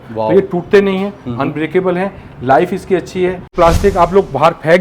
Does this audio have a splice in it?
yes; 1 cut; at 3.5 s

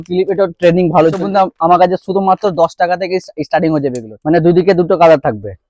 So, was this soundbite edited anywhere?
yes; 2 cuts; at 1.2 s, 4.1 s

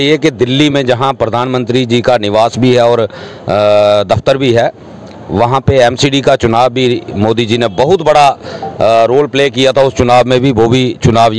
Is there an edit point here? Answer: no; 0 cuts

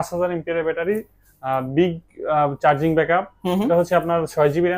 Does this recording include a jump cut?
no; 0 cuts

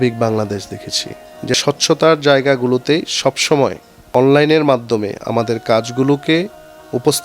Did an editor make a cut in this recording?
yes; 2 cuts; at 1.6 s, 3.9 s

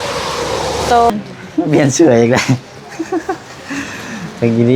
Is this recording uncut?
no; 1 cut; at 1.1 s

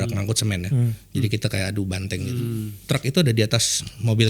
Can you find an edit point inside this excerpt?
yes; 1 cut; at 2.6 s

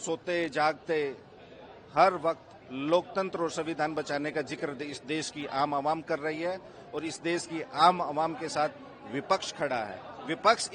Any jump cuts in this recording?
no; 0 cuts

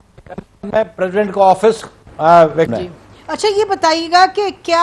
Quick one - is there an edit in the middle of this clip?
yes; 1 cut; at 2.7 s

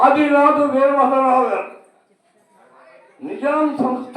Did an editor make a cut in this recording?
no; 0 cuts

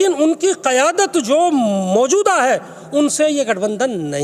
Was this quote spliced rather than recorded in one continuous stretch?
no; 0 cuts

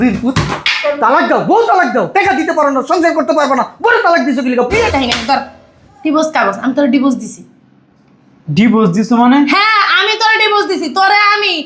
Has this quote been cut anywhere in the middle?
yes; 1 cut; at 4.9 s

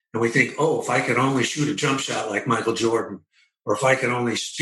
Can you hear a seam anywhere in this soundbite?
no; 0 cuts

